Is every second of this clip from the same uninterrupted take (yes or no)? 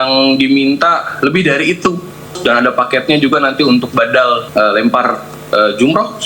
no